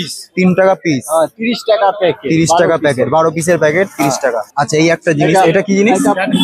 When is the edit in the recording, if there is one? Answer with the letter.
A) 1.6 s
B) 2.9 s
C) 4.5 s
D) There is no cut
C